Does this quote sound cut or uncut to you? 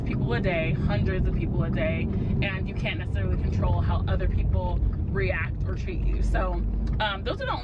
uncut